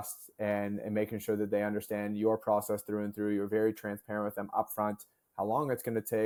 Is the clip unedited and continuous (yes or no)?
yes